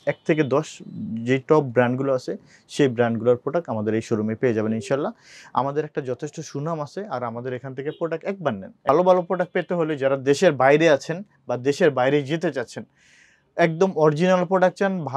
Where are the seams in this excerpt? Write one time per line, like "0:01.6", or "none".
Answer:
0:08.9